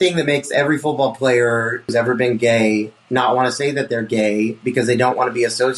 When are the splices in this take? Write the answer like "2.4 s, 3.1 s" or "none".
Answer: 1.9 s